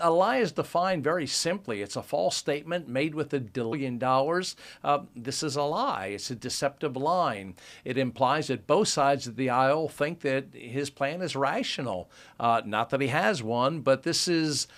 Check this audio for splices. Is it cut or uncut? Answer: uncut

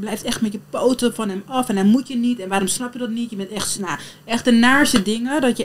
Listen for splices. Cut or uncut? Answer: uncut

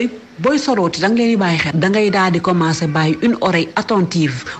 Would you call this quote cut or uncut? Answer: cut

